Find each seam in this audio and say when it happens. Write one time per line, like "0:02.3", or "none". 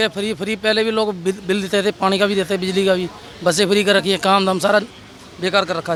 none